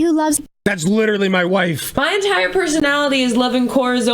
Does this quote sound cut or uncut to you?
cut